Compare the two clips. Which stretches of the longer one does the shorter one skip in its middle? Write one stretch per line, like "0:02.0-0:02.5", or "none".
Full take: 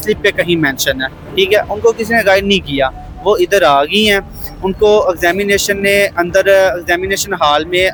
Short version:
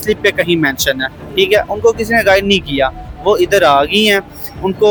none